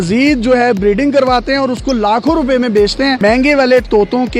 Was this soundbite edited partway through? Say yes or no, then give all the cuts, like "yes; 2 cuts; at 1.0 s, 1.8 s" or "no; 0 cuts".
yes; 1 cut; at 3.2 s